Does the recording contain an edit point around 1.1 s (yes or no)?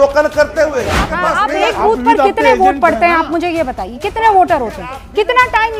yes